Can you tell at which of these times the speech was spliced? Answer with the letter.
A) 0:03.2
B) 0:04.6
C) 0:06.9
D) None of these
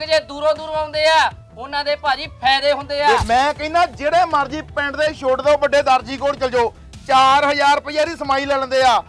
A